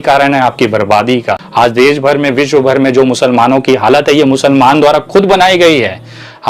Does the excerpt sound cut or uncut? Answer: cut